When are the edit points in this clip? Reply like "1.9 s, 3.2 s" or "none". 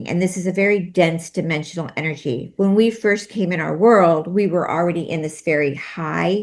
none